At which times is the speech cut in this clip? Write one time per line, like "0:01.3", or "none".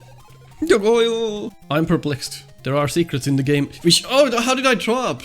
0:01.5